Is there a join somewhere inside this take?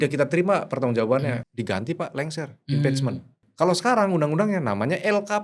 yes; 2 cuts; at 1.4 s, 3.4 s

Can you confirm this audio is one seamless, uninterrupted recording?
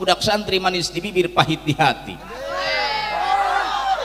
yes; 0 cuts

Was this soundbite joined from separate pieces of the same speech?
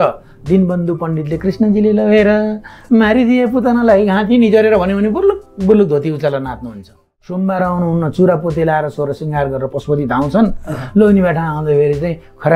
yes; 1 cut; at 7.4 s

